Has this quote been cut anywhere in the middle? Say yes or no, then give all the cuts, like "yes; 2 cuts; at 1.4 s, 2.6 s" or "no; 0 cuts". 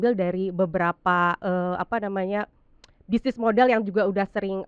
no; 0 cuts